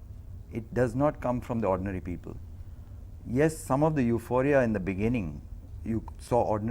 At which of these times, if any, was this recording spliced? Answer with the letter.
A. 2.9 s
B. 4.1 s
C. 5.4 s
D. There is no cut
C